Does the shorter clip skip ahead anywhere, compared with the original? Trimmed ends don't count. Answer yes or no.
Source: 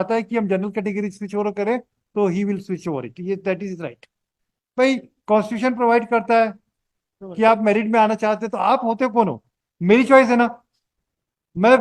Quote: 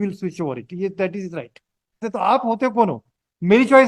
yes